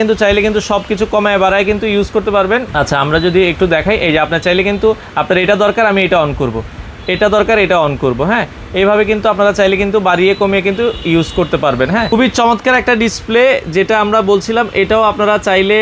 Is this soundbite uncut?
yes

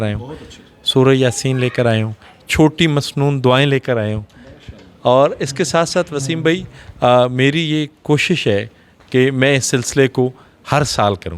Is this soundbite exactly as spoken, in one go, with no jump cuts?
yes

